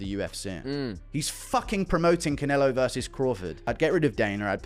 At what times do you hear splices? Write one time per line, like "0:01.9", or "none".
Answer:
0:03.6

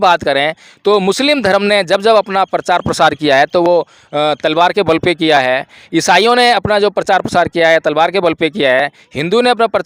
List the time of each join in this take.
none

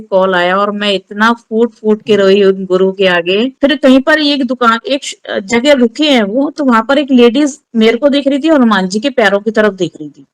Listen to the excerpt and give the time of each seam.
0:03.5

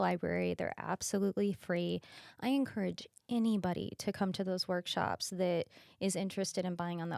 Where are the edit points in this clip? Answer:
none

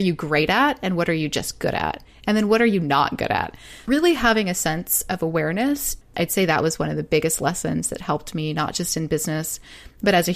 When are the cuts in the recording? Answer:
0:03.7
0:06.0

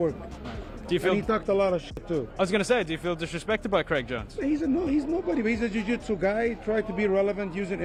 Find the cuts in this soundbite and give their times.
none

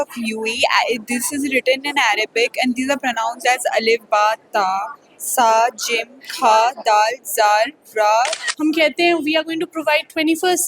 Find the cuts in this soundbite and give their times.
0:08.4

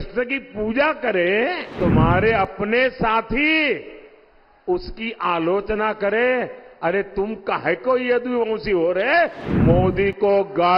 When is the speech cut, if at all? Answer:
0:01.7
0:09.5

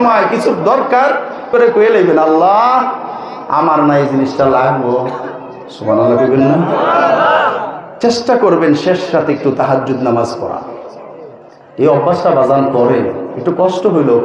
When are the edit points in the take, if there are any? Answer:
0:01.4

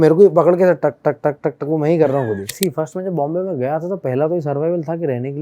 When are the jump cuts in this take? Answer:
0:02.6

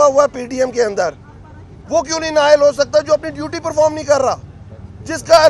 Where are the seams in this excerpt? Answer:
none

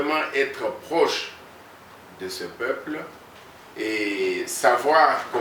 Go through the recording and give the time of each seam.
none

